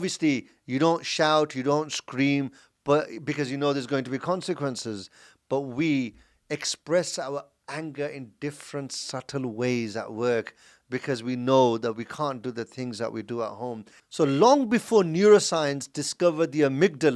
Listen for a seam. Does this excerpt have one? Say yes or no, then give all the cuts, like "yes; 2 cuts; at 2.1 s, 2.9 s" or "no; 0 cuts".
yes; 1 cut; at 14.0 s